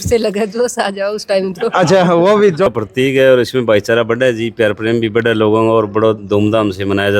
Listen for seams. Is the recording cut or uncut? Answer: cut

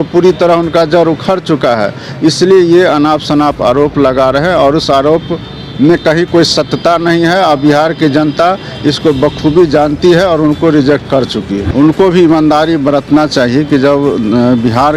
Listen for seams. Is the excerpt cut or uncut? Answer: cut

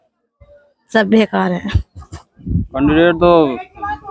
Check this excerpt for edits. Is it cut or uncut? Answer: cut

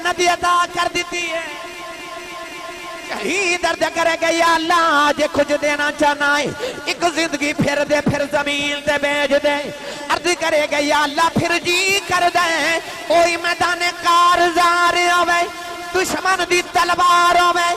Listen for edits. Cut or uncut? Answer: uncut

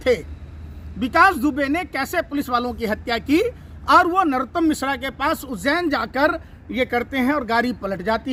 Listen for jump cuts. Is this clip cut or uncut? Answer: uncut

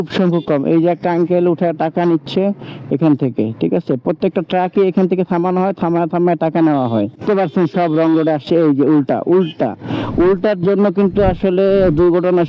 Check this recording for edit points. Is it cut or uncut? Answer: cut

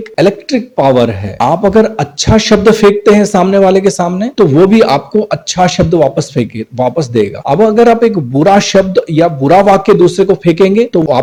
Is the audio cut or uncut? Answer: uncut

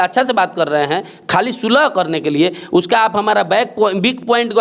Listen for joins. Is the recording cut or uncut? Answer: uncut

